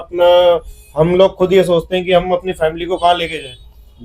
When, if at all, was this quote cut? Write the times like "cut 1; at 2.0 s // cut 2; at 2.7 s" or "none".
none

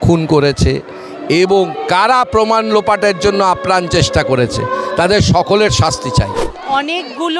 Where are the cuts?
cut 1; at 6.5 s

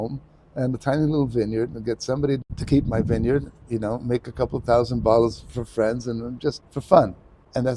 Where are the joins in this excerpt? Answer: cut 1; at 2.4 s

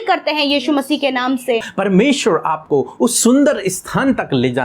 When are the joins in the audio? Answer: cut 1; at 1.7 s

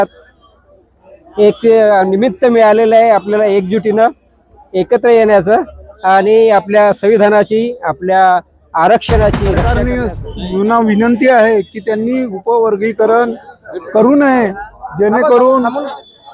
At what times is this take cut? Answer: cut 1; at 9.7 s

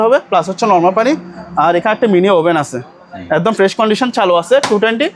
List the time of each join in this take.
none

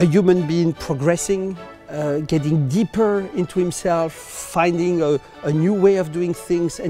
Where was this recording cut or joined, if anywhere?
none

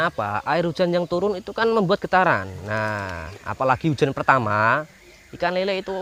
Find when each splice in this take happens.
none

